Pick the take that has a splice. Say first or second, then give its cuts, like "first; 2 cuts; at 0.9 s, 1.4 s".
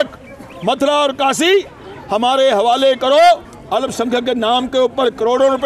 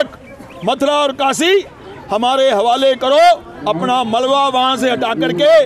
first; 1 cut; at 3.5 s